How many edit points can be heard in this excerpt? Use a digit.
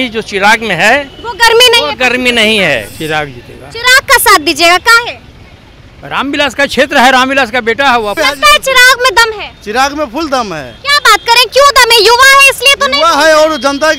2